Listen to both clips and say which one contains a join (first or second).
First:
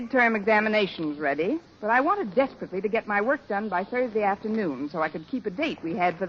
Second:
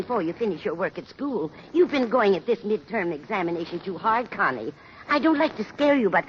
second